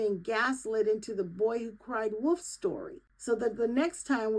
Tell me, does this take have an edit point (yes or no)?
no